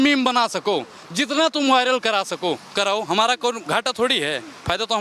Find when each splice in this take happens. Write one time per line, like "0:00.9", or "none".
none